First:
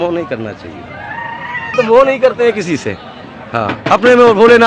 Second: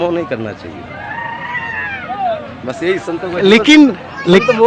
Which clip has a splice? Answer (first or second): first